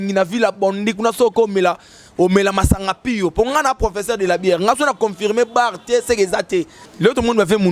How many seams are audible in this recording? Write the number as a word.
one